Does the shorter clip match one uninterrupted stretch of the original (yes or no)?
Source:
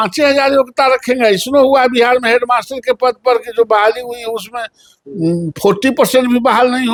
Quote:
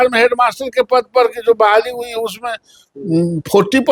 yes